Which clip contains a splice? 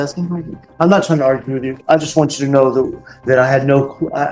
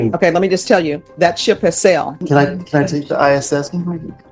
second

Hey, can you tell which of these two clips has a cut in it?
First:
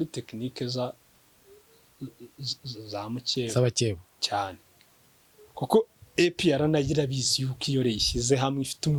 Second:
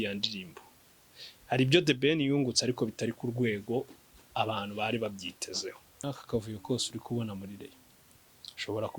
second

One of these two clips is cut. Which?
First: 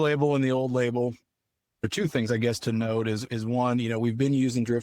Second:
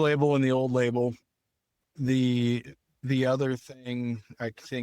first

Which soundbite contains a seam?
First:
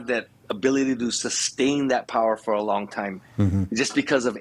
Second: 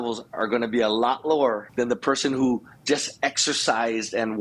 second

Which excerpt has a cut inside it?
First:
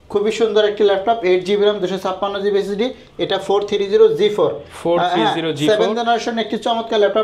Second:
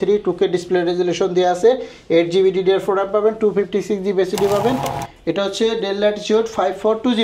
second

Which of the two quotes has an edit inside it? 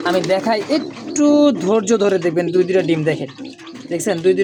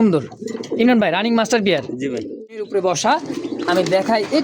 second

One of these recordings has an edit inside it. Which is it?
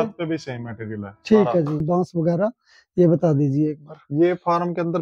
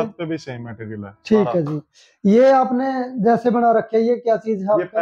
first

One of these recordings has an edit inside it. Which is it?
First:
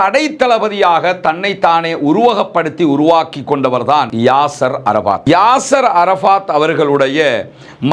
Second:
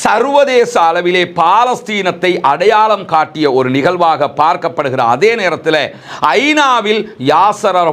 first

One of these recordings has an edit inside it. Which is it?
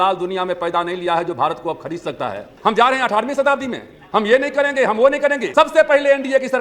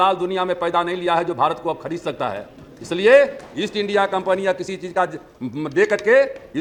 first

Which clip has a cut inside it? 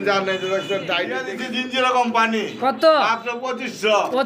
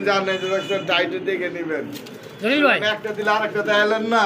first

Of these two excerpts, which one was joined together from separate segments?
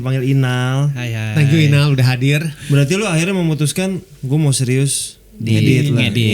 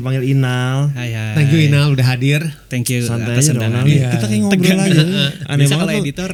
first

